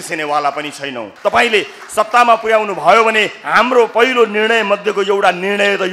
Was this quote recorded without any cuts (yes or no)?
no